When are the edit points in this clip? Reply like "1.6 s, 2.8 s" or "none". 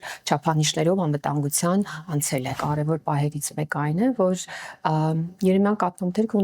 3.0 s